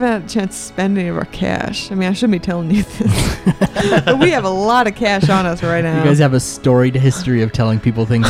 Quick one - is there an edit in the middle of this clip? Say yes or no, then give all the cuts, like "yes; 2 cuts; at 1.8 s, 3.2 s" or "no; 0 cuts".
no; 0 cuts